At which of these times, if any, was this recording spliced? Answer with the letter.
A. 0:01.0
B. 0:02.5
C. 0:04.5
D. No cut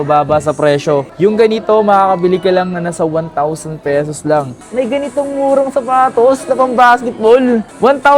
C